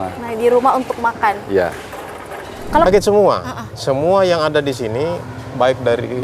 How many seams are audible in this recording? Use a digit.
1